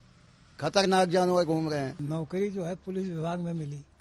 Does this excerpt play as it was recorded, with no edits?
no; 1 cut; at 2.0 s

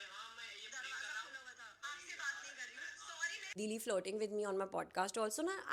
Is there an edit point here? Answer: yes; 2 cuts; at 1.8 s, 3.6 s

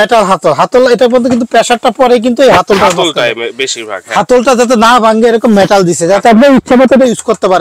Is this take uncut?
yes; 0 cuts

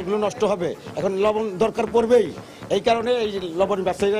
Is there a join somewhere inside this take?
no; 0 cuts

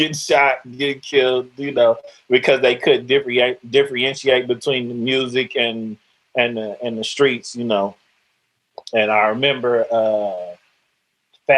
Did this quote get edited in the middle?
no; 0 cuts

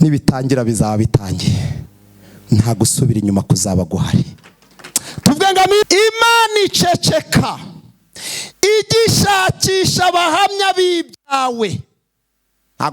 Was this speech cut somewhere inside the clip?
yes; 1 cut; at 5.8 s

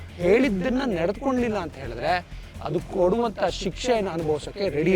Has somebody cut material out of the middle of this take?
no; 0 cuts

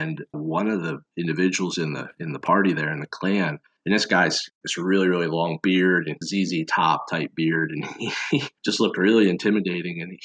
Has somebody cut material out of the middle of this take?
no; 0 cuts

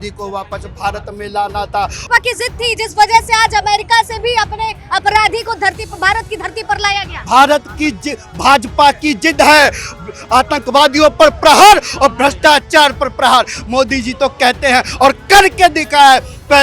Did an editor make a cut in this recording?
yes; 1 cut; at 2.0 s

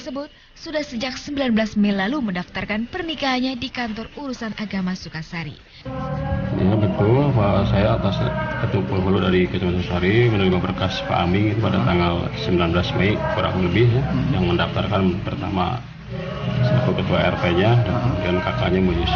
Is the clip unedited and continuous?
no; 1 cut; at 12.1 s

